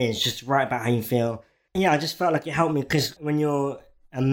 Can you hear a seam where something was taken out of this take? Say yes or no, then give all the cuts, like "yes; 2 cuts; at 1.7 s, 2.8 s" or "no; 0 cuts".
yes; 2 cuts; at 1.7 s, 3.1 s